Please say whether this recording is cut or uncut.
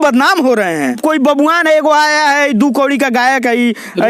cut